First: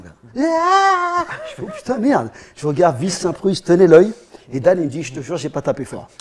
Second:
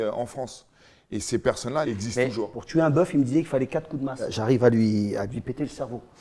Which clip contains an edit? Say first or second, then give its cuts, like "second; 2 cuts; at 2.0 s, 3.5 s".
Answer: second; 2 cuts; at 2.0 s, 4.3 s